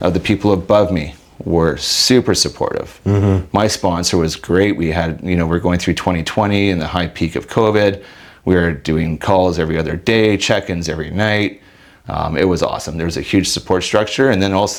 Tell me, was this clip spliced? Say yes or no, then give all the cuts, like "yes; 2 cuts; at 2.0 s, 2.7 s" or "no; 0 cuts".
no; 0 cuts